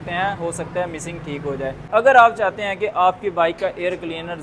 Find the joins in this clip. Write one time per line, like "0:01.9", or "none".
0:01.9